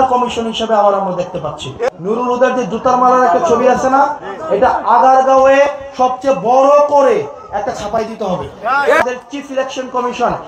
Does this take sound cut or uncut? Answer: cut